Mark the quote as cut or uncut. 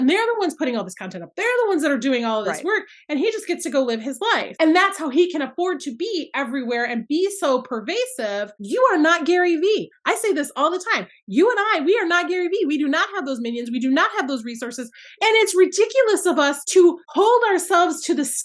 cut